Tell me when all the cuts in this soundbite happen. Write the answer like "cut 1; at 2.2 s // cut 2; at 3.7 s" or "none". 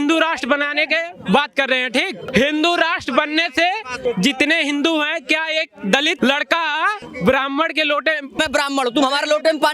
cut 1; at 2.2 s // cut 2; at 3.9 s // cut 3; at 6.2 s // cut 4; at 7.1 s // cut 5; at 8.4 s